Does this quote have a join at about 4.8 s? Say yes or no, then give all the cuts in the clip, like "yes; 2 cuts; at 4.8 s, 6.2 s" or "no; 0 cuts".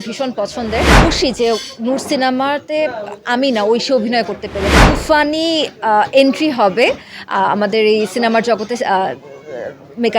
yes; 2 cuts; at 0.9 s, 4.8 s